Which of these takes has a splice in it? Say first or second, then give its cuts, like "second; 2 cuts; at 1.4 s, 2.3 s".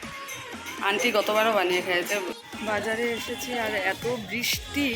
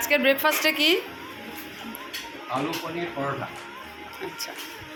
first; 1 cut; at 2.4 s